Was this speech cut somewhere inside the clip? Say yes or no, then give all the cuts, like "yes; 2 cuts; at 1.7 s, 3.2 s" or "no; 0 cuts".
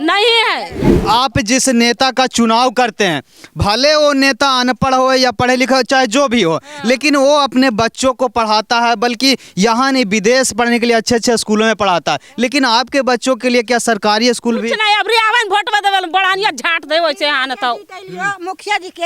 yes; 1 cut; at 1.0 s